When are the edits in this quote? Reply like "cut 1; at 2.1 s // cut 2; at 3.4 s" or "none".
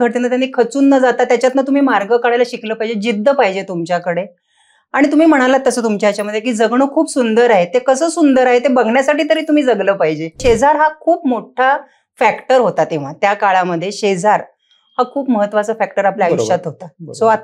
cut 1; at 10.4 s